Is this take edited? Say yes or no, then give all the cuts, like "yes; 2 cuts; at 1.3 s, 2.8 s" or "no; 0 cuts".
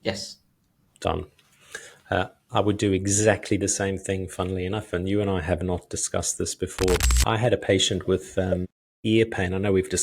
yes; 1 cut; at 7.0 s